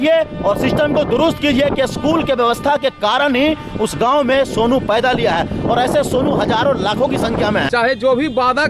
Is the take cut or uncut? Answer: cut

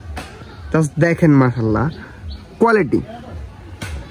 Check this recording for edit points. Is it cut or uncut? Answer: uncut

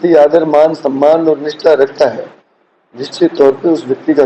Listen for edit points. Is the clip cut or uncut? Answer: uncut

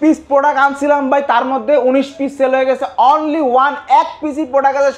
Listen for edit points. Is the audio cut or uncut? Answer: uncut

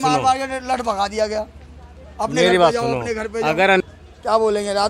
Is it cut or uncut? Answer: cut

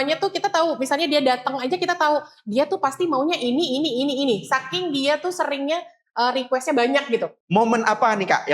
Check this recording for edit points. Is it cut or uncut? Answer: cut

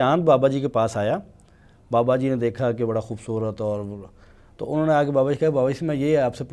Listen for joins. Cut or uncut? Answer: uncut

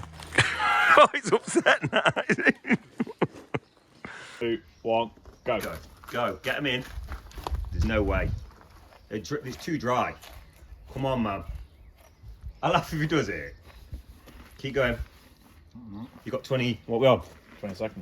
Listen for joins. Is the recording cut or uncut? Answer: cut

